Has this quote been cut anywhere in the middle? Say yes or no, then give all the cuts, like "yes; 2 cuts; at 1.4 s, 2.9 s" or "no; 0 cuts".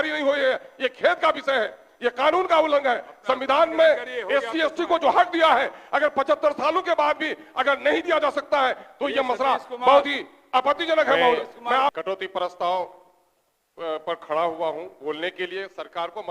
yes; 1 cut; at 11.9 s